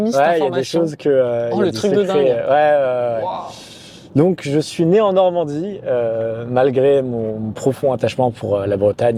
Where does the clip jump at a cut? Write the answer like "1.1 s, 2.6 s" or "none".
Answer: none